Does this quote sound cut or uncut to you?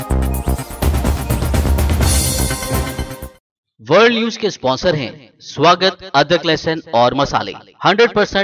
cut